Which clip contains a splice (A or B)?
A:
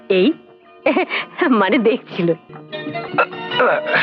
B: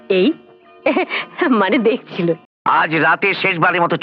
B